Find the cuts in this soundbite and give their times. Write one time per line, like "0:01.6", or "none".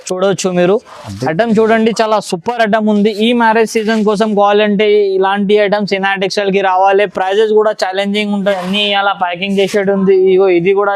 0:08.6